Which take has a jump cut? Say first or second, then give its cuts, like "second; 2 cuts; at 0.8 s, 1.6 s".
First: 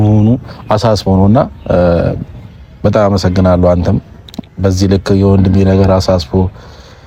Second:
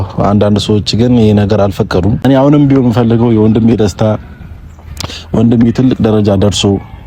second; 1 cut; at 2.2 s